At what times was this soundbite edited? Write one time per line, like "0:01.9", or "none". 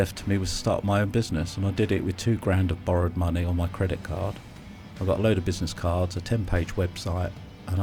none

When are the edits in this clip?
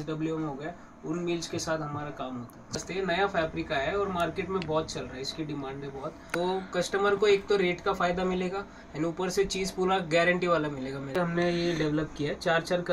0:02.8
0:06.2
0:11.2

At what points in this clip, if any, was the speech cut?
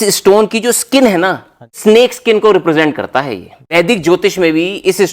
0:01.8
0:03.7

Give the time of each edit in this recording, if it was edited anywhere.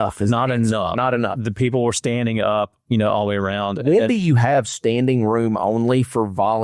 none

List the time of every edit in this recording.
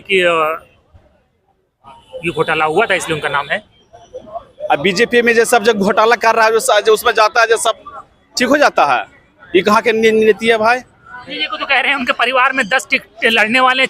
0:11.5

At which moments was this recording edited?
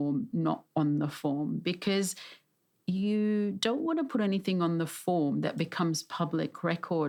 none

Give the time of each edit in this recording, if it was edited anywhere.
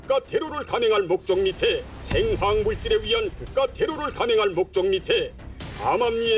0:01.9
0:05.4

